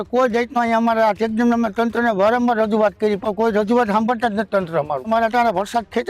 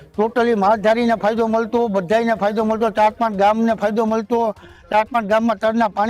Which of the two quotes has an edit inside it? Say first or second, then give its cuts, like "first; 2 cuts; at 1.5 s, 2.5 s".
first; 1 cut; at 5.1 s